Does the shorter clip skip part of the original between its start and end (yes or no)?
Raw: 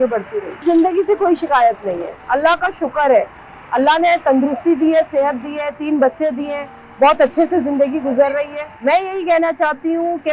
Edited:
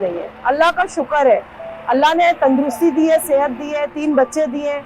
no